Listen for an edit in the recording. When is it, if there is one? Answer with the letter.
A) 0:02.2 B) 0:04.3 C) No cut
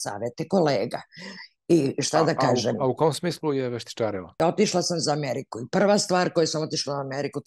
B